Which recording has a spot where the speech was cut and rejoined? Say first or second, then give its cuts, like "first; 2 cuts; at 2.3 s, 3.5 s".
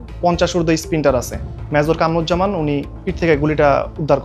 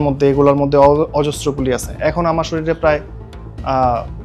first; 2 cuts; at 1.4 s, 3.0 s